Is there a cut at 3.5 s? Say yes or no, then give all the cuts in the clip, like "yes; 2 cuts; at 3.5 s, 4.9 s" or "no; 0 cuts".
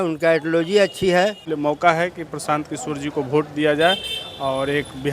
no; 1 cut; at 1.5 s